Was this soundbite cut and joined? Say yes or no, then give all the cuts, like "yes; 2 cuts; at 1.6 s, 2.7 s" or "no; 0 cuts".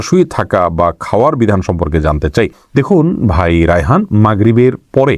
no; 0 cuts